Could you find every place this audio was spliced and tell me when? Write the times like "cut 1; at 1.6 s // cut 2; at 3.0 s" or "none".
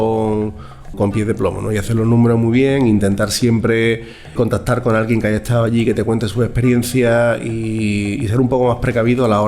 cut 1; at 0.9 s // cut 2; at 4.3 s